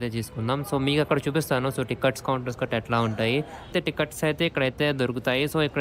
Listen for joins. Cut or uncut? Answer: cut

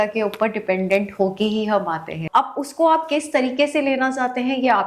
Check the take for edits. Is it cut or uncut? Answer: cut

